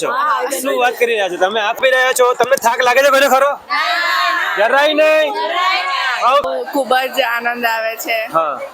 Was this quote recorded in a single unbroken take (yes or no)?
no